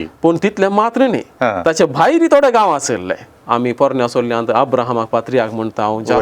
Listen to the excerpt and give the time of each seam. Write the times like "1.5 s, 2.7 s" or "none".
3.3 s